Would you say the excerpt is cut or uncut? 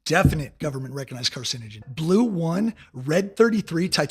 cut